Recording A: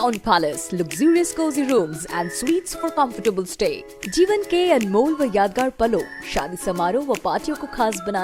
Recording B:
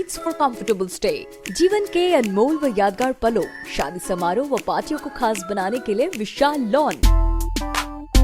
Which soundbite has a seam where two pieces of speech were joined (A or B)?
B